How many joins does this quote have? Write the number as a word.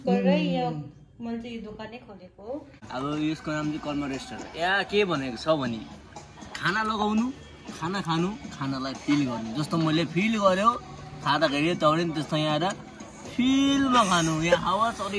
one